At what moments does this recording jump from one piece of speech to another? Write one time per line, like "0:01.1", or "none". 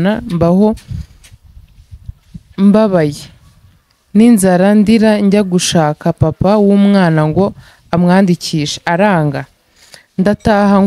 none